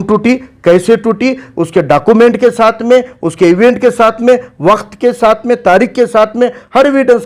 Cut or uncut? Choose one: uncut